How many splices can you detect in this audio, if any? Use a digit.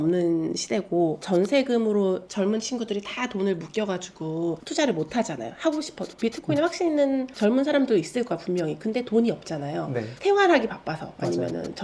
0